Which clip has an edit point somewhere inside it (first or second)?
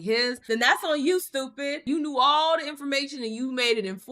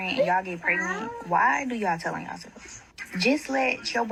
first